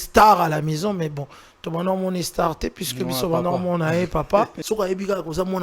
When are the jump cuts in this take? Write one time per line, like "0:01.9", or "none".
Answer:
0:04.6